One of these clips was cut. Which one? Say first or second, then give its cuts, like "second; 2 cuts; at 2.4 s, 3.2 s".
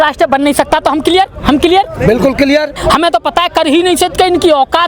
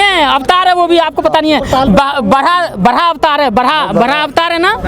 first; 1 cut; at 2.8 s